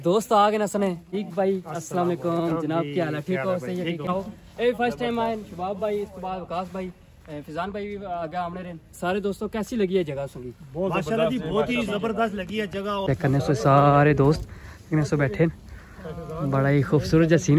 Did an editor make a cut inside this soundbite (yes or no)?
yes